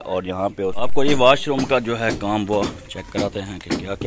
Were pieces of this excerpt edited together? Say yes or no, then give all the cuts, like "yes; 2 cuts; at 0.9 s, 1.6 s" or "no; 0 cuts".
yes; 1 cut; at 0.9 s